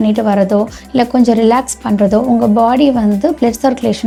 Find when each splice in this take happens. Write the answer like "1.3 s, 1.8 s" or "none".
none